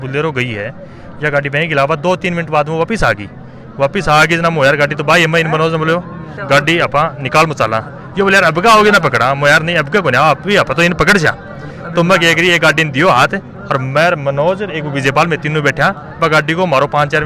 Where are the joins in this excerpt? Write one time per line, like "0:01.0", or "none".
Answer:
none